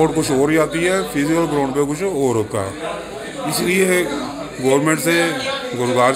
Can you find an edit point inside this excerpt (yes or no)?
no